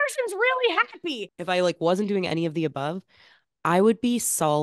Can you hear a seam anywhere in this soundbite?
yes; 1 cut; at 1.1 s

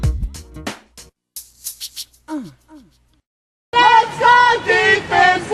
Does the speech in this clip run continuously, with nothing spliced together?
yes; 0 cuts

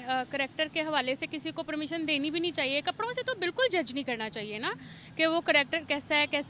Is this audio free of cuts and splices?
yes; 0 cuts

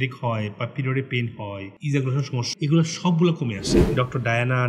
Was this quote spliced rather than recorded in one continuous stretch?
yes; 2 cuts; at 2.4 s, 3.7 s

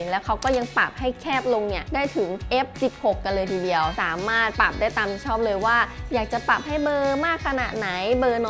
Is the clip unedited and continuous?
yes; 0 cuts

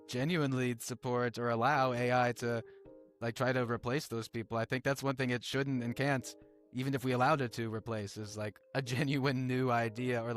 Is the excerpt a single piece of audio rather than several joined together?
no; 1 cut; at 8.6 s

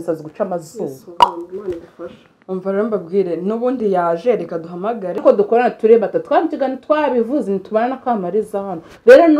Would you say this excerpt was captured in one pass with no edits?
no; 1 cut; at 5.2 s

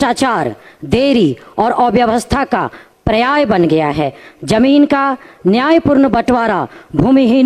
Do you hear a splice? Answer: no; 0 cuts

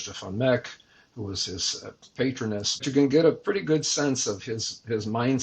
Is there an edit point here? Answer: yes; 1 cut; at 2.8 s

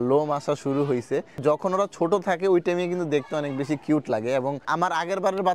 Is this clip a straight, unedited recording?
yes; 0 cuts

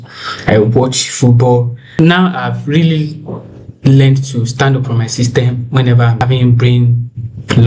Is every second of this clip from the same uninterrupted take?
no; 2 cuts; at 1.8 s, 6.2 s

